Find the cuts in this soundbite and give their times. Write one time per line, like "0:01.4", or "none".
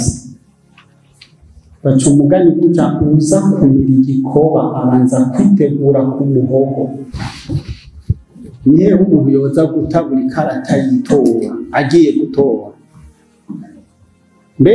0:07.2